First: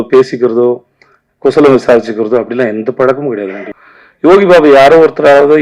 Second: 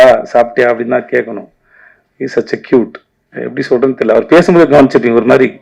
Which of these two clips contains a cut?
first; 1 cut; at 3.7 s

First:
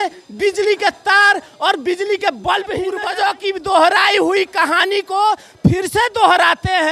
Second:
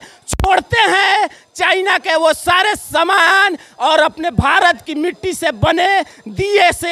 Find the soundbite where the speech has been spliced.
first; 1 cut; at 3.0 s

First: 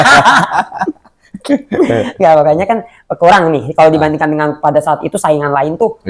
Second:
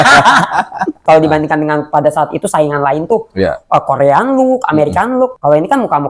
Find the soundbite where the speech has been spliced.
second; 1 cut; at 1.0 s

